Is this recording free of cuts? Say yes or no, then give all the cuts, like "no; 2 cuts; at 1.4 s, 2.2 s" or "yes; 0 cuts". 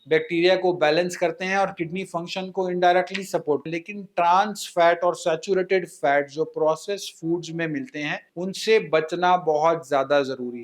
no; 1 cut; at 3.7 s